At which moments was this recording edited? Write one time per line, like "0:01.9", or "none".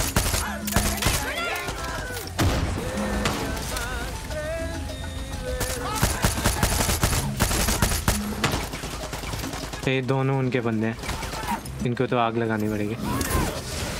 none